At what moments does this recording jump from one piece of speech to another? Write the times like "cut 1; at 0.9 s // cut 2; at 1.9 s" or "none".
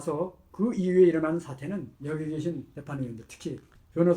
cut 1; at 1.9 s // cut 2; at 2.7 s